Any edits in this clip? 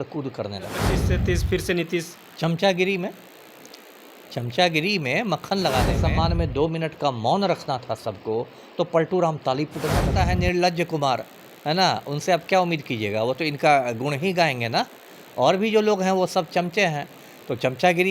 yes; 3 cuts; at 1.0 s, 5.9 s, 10.1 s

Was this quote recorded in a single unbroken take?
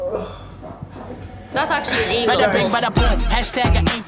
no; 1 cut; at 2.7 s

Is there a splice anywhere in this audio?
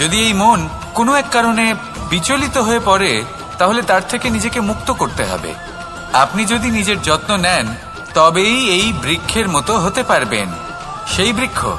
no; 0 cuts

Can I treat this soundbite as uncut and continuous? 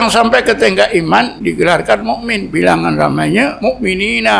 no; 3 cuts; at 1.3 s, 2.5 s, 3.6 s

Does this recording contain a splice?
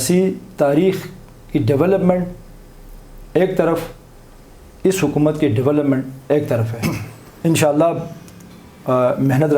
yes; 1 cut; at 6.7 s

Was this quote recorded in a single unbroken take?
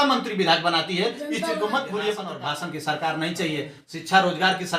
no; 1 cut; at 2.3 s

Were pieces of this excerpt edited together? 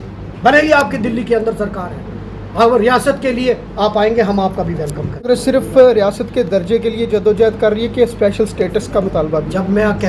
yes; 1 cut; at 5.3 s

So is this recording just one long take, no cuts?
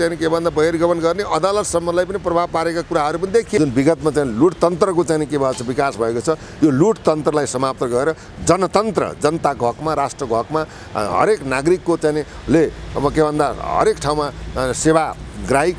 no; 1 cut; at 3.6 s

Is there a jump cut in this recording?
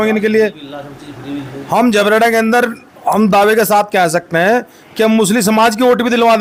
no; 0 cuts

